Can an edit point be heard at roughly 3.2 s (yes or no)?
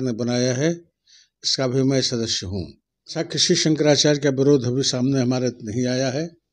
yes